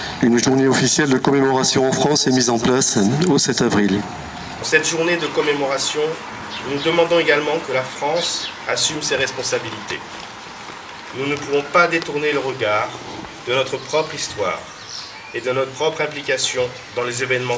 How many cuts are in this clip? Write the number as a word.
one